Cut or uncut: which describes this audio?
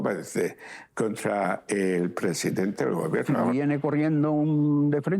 cut